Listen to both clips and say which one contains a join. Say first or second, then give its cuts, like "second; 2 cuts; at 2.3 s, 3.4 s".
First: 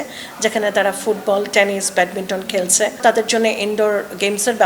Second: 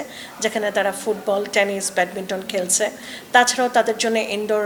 first; 1 cut; at 3.0 s